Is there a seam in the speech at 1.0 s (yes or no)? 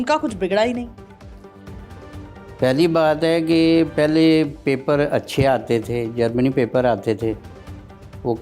no